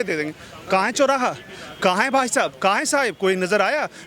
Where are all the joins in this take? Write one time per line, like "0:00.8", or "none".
none